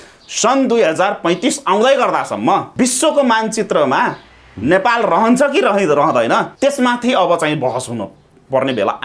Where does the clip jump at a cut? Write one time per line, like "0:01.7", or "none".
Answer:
0:02.7
0:06.5